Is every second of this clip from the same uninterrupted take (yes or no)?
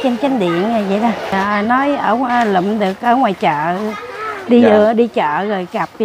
no